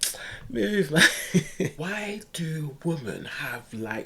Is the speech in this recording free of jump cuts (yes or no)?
no